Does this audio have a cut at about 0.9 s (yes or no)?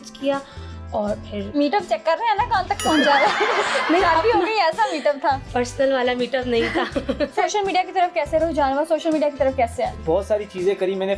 no